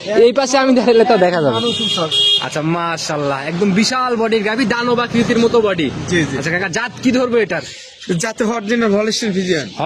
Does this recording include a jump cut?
no; 0 cuts

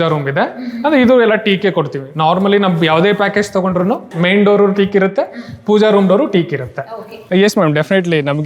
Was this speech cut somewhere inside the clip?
yes; 2 cuts; at 4.1 s, 6.9 s

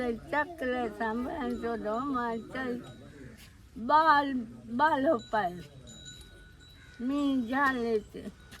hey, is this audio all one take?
yes; 0 cuts

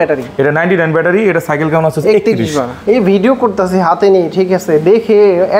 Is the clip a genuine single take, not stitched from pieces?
no; 1 cut; at 2.7 s

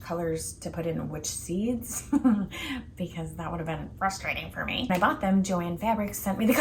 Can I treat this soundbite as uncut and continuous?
no; 1 cut; at 4.9 s

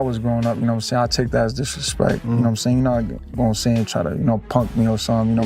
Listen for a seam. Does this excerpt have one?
no; 0 cuts

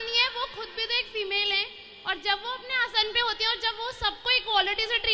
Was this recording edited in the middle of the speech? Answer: no; 0 cuts

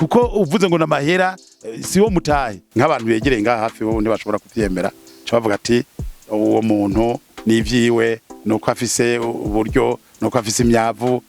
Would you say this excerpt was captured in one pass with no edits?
no; 1 cut; at 2.6 s

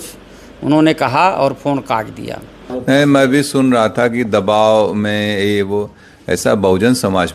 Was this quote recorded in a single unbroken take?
no; 1 cut; at 2.7 s

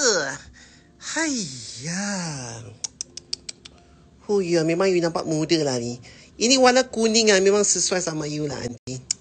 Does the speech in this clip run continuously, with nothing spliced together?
no; 1 cut; at 5.2 s

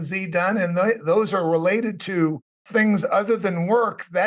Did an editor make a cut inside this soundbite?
yes; 1 cut; at 2.6 s

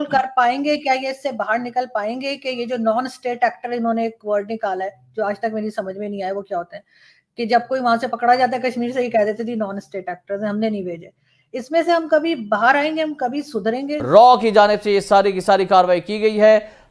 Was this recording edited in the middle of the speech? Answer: yes; 1 cut; at 14.1 s

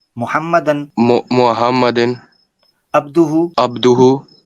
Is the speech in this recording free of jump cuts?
no; 2 cuts; at 0.9 s, 3.5 s

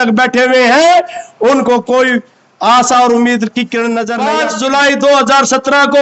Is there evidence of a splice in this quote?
yes; 1 cut; at 4.2 s

